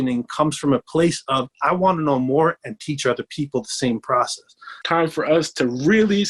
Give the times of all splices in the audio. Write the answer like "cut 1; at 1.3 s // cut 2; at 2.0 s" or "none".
cut 1; at 4.7 s